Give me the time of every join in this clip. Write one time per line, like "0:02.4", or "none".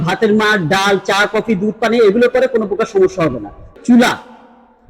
0:03.7